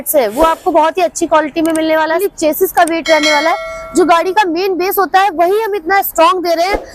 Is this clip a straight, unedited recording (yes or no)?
yes